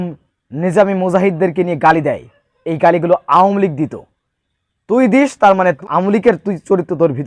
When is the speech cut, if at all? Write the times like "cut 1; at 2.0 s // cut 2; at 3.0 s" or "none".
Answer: cut 1; at 5.8 s